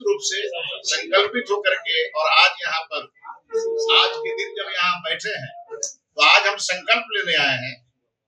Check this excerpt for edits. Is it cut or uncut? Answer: uncut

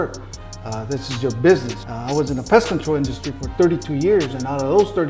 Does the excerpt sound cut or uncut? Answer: cut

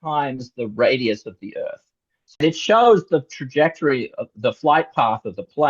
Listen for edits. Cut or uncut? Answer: cut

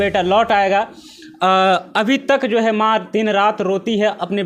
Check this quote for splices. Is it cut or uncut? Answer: uncut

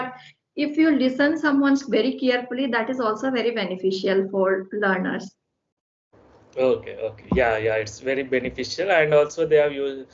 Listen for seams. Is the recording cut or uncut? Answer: uncut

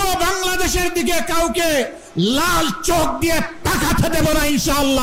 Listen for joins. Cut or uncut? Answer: uncut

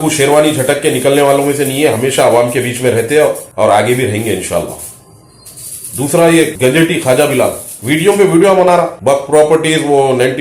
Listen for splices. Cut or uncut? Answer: uncut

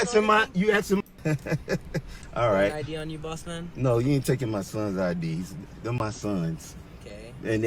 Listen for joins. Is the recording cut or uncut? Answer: uncut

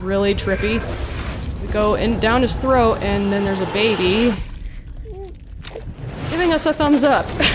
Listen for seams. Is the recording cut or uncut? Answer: uncut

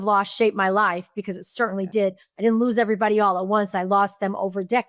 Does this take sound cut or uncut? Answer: uncut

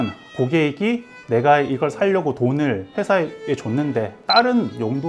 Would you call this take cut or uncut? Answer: cut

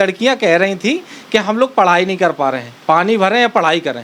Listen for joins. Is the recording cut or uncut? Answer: uncut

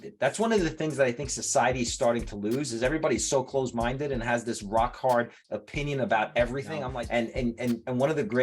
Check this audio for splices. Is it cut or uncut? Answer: cut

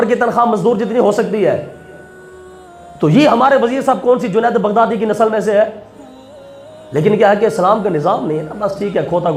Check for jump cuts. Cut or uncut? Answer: uncut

